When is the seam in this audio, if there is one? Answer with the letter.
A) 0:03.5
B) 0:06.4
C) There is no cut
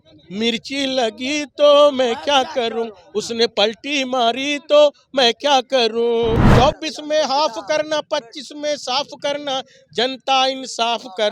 B